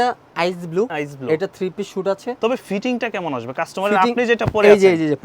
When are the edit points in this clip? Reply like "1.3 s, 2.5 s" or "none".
0.9 s, 2.4 s